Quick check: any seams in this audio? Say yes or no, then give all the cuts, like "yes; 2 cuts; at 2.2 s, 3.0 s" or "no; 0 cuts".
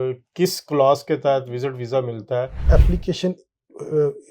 yes; 1 cut; at 2.6 s